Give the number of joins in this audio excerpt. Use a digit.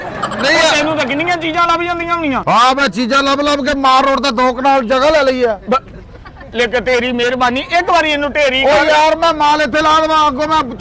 0